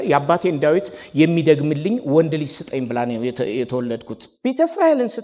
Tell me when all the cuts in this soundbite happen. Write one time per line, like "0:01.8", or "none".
0:04.3